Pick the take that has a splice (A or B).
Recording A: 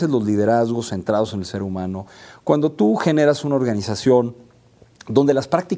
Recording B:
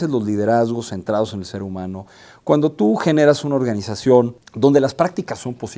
B